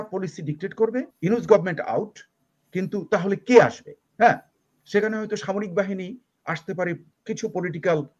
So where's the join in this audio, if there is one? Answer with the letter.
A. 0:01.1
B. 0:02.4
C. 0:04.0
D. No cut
A